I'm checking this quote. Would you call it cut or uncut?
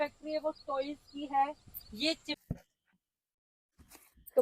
cut